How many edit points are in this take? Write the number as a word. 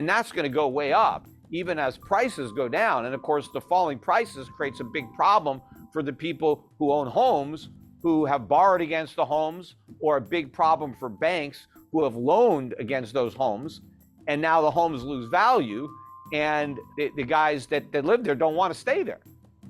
one